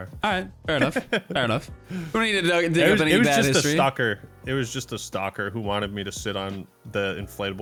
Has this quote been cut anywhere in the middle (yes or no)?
no